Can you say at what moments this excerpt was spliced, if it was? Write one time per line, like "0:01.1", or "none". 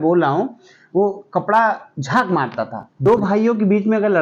0:02.8